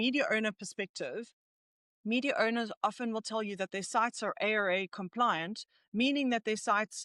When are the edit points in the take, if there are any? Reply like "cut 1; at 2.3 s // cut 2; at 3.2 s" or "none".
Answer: none